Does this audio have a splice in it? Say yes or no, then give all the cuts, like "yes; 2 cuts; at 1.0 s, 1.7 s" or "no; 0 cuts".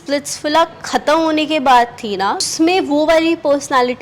yes; 1 cut; at 2.5 s